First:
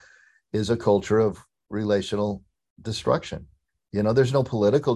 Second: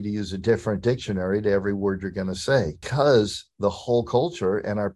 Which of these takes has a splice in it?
second; 1 cut; at 2.8 s

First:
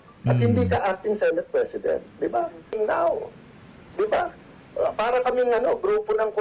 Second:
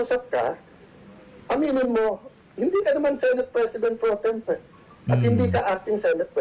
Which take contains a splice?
first; 1 cut; at 2.8 s

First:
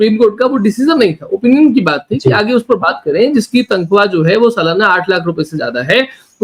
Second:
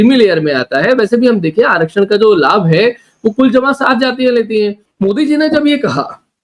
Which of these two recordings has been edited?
second; 1 cut; at 4.8 s

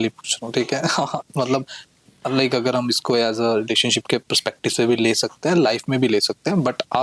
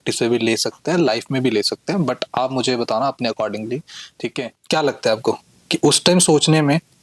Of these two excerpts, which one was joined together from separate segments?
second; 1 cut; at 4.6 s

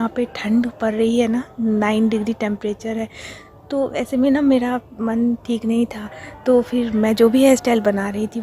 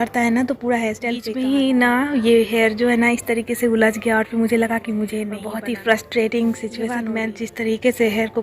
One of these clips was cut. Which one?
second; 3 cuts; at 1.2 s, 5.4 s, 6.9 s

